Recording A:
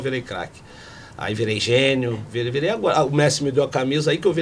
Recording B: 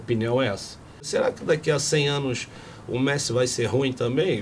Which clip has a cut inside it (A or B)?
B